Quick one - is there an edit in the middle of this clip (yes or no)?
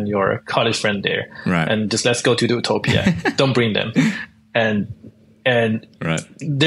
no